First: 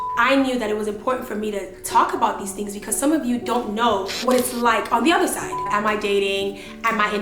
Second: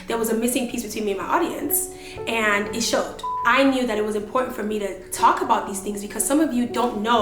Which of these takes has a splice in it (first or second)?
first